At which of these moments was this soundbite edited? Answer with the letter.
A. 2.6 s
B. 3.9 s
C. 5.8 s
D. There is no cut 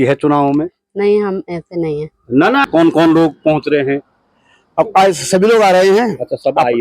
A